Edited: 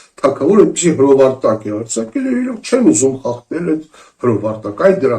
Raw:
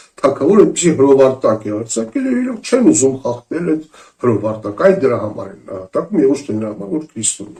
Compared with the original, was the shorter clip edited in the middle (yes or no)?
no